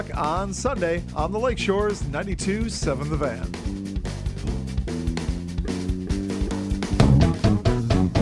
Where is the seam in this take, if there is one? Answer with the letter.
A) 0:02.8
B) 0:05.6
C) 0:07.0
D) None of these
C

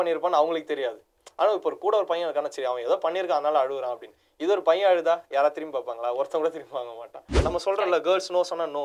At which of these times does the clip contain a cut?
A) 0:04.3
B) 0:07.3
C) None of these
B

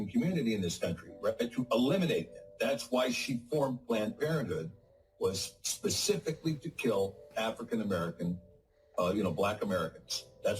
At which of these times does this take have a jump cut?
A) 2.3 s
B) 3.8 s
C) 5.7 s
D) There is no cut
B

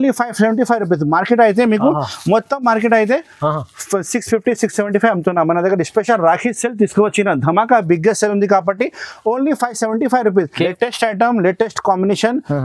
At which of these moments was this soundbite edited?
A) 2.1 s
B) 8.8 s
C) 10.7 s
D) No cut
C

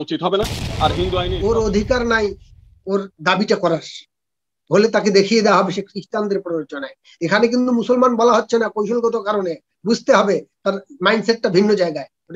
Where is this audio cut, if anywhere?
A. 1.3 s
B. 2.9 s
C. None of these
A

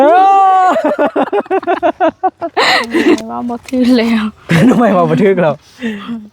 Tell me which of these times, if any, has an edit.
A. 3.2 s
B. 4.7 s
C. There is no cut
A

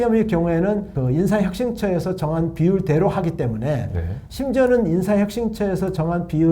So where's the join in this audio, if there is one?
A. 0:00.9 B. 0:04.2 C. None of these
A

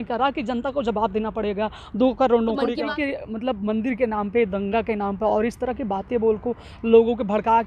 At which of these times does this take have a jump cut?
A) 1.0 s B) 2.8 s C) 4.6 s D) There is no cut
B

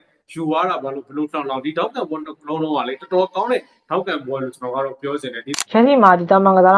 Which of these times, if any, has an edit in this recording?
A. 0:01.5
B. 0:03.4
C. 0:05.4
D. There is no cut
C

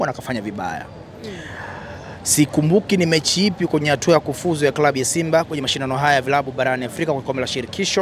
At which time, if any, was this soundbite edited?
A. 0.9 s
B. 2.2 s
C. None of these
C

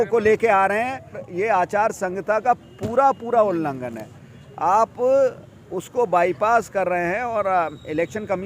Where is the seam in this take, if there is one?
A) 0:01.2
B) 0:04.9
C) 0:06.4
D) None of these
A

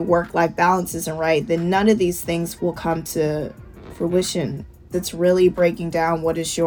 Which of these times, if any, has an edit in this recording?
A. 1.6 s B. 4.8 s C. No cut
B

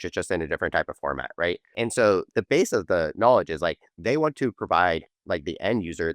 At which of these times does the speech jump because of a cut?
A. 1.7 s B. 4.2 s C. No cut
A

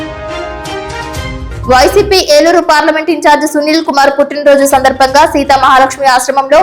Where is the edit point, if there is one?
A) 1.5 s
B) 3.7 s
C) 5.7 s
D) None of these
A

